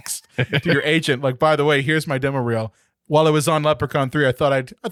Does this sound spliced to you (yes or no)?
no